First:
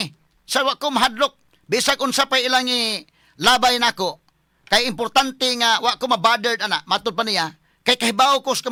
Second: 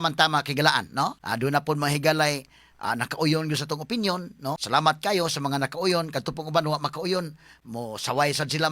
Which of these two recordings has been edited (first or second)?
second